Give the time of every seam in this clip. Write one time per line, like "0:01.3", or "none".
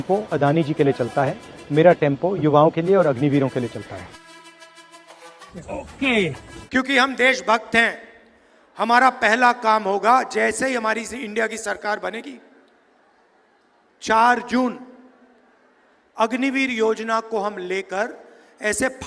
0:06.5